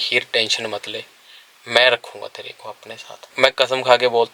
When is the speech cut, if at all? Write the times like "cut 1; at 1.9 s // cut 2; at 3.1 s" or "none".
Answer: cut 1; at 3.3 s